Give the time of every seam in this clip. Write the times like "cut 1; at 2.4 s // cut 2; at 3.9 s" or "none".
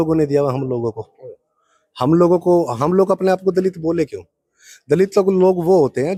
none